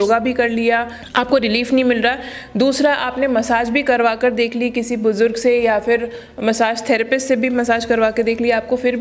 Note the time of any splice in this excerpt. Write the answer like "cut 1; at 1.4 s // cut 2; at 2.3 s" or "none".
none